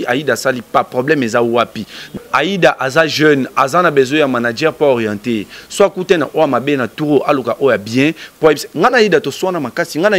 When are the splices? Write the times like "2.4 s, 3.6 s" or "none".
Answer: 2.1 s